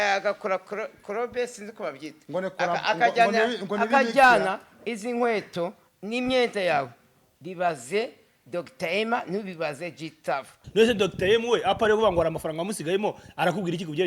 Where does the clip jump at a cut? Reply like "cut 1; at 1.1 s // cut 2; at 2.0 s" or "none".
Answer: cut 1; at 10.6 s